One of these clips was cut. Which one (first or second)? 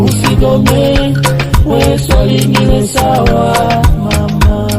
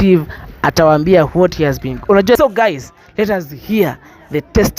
second